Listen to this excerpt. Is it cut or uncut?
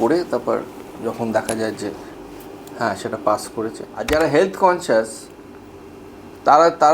cut